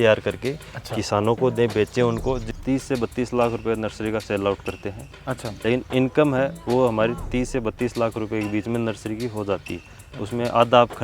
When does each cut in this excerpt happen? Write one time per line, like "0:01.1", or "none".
0:02.5
0:05.5